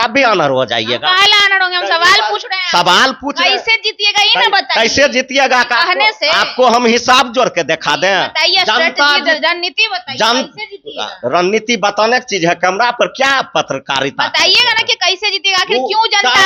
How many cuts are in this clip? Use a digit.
0